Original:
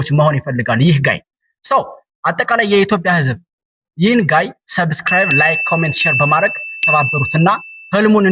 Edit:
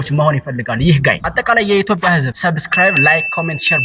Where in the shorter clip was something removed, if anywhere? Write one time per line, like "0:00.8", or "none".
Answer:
0:01.2
0:02.3